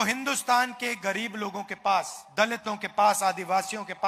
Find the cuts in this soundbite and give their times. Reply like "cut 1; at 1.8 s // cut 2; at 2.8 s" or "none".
cut 1; at 2.2 s